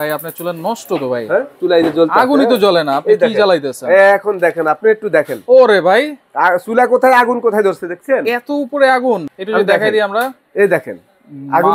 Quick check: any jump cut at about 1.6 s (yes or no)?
yes